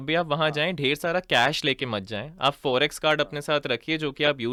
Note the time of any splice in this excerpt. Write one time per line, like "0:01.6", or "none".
none